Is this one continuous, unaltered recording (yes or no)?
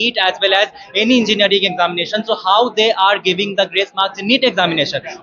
yes